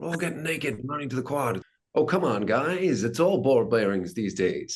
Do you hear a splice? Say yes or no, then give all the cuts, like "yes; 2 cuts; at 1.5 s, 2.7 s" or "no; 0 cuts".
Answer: yes; 1 cut; at 1.7 s